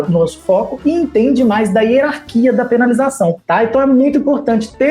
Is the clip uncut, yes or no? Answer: no